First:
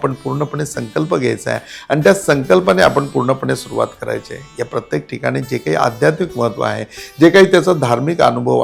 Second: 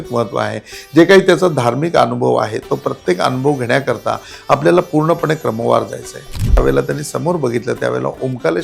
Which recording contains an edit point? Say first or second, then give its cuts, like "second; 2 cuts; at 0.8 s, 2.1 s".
second; 1 cut; at 6.6 s